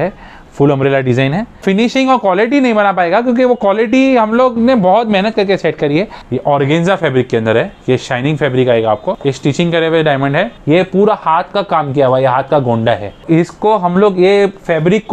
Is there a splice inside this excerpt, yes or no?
yes